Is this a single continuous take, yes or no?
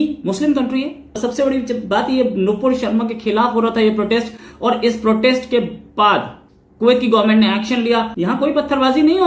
no